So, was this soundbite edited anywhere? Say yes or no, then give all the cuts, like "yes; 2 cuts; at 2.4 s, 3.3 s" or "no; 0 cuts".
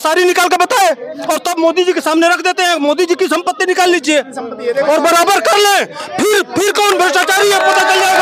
no; 0 cuts